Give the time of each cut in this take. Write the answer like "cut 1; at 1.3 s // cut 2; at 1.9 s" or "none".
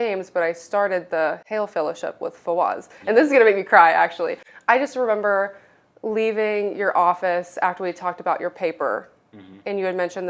none